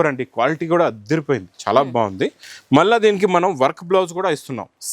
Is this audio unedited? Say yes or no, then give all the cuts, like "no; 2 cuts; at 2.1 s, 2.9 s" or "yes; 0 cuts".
yes; 0 cuts